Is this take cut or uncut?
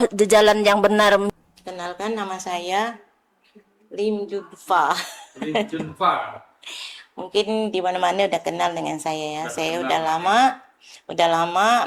cut